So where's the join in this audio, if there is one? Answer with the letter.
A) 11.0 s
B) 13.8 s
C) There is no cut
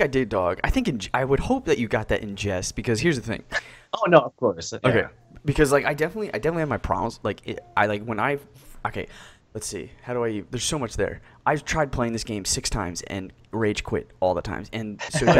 B